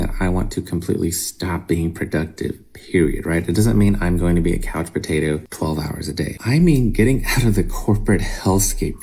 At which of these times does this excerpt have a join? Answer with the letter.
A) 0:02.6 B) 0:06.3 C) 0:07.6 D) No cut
B